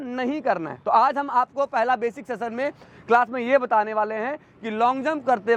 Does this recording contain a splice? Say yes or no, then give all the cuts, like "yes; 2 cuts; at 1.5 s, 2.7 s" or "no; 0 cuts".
no; 0 cuts